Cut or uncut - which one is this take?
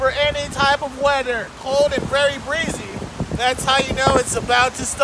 cut